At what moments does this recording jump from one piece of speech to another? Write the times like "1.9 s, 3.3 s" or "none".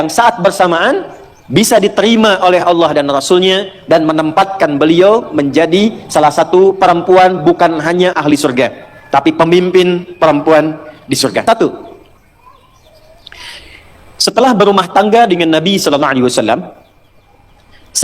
11.4 s